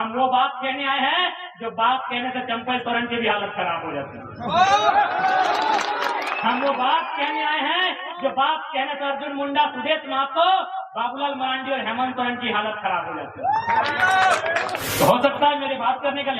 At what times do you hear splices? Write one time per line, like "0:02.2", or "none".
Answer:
0:14.8